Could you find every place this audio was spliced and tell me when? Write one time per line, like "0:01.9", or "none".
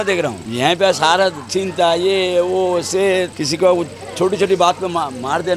none